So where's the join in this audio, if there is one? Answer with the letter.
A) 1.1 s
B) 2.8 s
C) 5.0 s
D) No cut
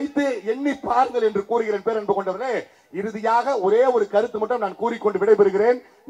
D